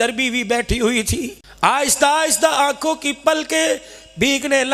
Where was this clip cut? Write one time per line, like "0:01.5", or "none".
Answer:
0:01.4